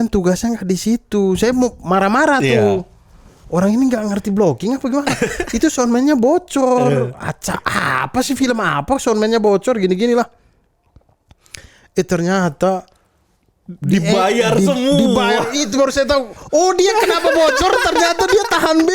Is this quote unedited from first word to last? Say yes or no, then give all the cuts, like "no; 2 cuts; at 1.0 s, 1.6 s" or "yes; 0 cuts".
yes; 0 cuts